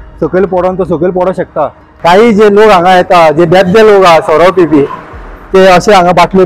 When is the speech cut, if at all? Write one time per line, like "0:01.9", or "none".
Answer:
0:01.8